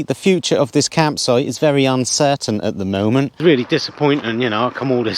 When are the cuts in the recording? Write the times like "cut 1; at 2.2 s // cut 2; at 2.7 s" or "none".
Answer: cut 1; at 3.3 s